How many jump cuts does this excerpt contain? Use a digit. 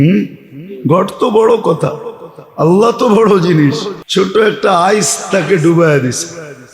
1